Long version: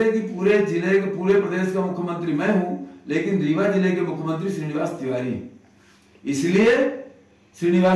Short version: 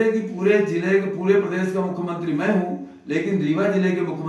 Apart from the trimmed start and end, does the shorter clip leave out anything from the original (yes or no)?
no